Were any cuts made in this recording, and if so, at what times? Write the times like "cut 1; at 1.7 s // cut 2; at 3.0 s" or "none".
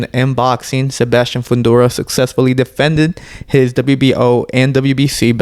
none